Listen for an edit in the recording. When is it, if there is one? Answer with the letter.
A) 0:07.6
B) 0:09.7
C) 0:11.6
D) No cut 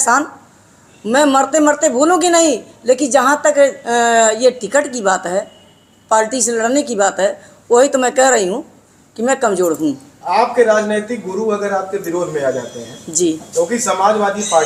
D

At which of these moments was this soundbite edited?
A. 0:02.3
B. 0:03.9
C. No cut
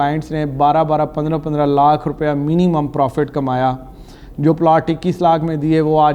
C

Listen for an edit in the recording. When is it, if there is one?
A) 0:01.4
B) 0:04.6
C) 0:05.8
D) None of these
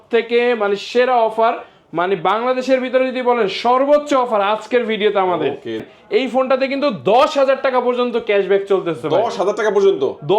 C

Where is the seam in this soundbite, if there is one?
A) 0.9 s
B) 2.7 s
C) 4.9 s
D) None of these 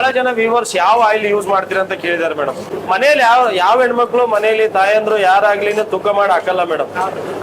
B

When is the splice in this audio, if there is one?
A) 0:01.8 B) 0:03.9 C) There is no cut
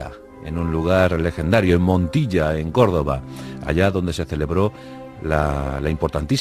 A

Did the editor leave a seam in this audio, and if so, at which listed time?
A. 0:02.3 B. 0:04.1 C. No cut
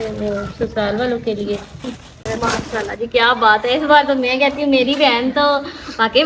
A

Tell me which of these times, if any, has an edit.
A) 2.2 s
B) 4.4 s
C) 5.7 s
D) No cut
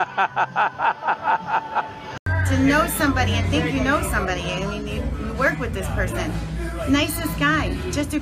A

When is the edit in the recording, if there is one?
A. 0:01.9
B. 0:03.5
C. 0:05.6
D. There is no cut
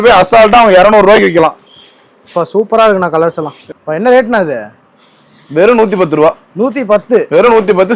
B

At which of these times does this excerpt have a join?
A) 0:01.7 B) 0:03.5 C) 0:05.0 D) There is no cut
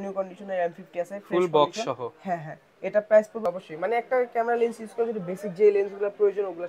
B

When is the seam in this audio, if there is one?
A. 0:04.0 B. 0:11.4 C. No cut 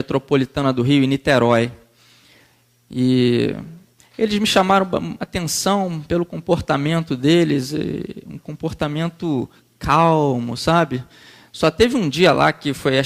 B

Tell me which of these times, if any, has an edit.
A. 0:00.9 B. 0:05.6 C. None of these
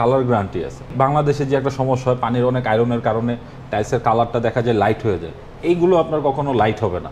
A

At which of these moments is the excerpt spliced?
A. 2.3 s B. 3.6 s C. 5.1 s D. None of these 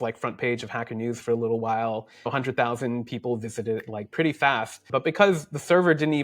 A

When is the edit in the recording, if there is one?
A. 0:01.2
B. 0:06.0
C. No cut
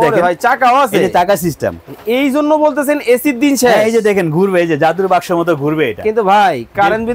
C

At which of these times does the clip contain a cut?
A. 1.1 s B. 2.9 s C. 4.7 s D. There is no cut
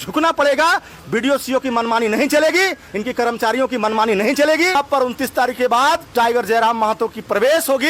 C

